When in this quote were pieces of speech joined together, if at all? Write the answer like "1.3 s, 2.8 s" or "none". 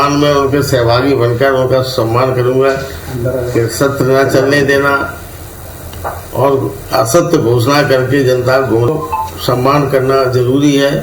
8.9 s